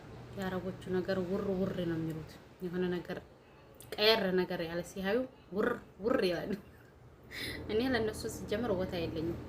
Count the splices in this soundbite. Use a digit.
0